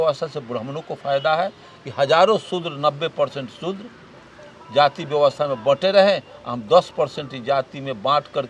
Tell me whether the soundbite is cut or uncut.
uncut